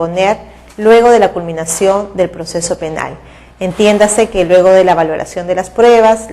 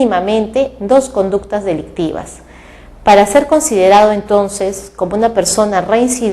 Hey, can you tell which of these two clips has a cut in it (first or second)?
second